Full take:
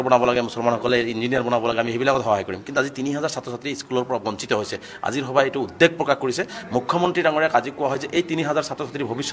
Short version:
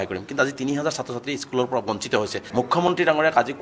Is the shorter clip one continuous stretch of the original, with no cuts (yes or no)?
no